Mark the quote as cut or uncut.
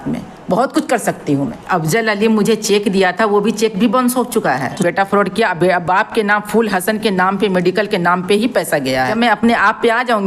cut